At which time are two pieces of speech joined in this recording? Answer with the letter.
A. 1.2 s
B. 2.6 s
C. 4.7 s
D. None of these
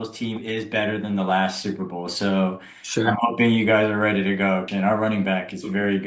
C